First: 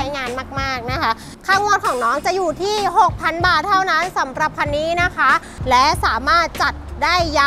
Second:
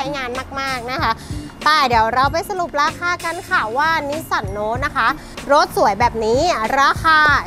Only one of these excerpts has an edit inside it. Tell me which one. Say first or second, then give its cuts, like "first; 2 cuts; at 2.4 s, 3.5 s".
first; 2 cuts; at 1.3 s, 5.5 s